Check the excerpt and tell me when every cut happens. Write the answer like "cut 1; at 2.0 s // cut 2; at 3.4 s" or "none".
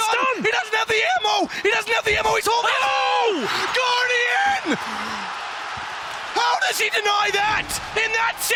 none